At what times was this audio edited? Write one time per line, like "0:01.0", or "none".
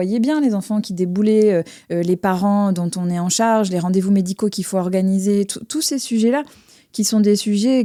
none